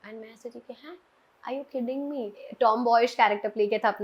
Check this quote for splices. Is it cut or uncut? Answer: cut